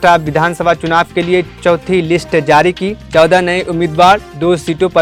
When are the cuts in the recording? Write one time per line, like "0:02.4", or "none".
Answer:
none